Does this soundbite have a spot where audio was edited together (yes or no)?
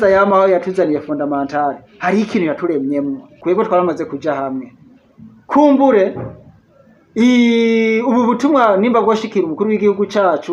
yes